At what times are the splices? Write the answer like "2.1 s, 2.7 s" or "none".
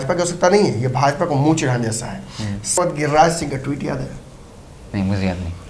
2.8 s